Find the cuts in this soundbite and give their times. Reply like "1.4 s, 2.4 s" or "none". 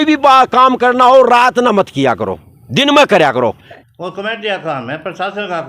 3.7 s